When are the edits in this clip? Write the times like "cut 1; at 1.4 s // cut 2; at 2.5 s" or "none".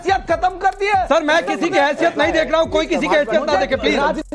none